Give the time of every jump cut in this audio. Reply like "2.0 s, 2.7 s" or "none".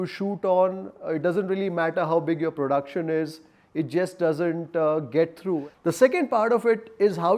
5.7 s

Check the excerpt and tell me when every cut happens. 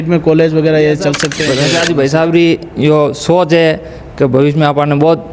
1.4 s

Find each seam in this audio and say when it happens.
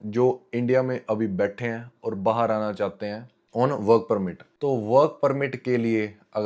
none

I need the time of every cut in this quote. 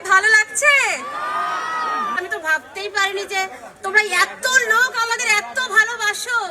2.2 s

